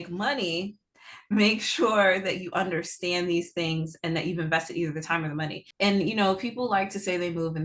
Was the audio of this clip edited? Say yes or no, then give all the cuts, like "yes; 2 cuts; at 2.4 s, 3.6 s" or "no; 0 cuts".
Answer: yes; 1 cut; at 5.6 s